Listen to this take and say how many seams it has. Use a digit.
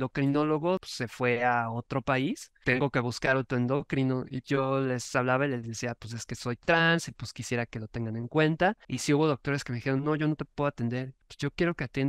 5